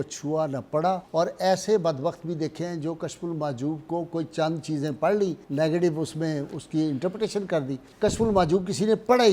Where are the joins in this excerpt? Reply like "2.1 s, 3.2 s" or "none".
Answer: 1.1 s, 5.4 s, 7.8 s